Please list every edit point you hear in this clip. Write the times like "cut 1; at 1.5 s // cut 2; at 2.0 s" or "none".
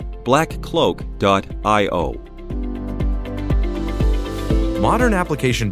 cut 1; at 2.3 s // cut 2; at 4.7 s